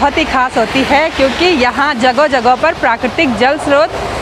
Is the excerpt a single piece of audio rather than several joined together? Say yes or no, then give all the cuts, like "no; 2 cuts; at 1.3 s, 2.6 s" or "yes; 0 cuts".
yes; 0 cuts